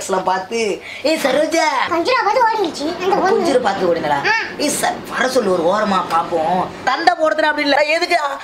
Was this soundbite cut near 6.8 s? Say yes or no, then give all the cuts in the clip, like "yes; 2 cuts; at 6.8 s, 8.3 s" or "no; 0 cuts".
yes; 1 cut; at 6.8 s